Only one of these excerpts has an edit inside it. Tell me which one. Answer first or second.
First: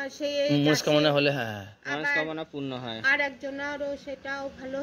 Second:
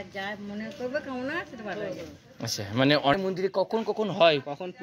second